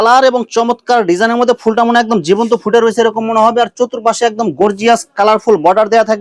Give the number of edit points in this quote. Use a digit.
0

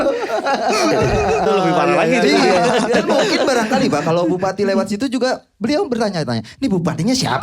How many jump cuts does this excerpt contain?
1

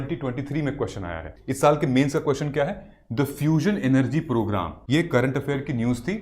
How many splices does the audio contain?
2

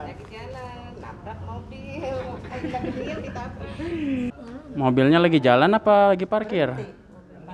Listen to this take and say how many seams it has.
1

